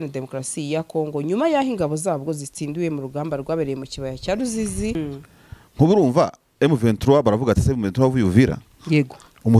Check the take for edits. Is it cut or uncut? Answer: cut